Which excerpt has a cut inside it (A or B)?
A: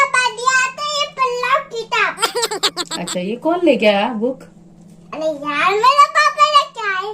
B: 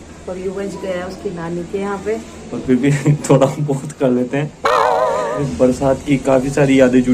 B